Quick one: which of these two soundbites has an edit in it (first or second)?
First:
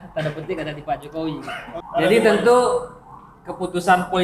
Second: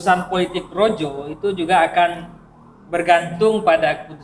first